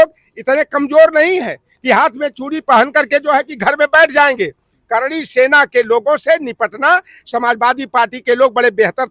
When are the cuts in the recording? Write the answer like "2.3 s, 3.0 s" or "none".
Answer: none